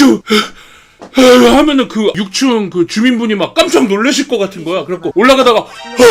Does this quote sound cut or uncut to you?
uncut